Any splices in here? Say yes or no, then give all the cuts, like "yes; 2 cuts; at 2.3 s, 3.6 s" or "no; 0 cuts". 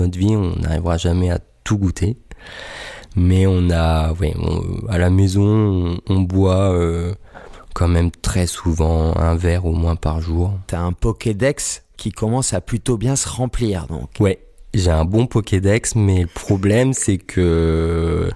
no; 0 cuts